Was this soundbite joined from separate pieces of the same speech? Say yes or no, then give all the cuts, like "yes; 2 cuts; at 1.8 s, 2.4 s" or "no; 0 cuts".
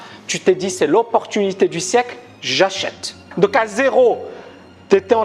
yes; 1 cut; at 3.2 s